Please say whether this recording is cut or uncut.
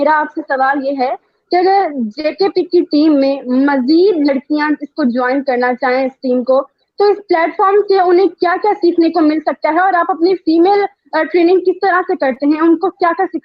uncut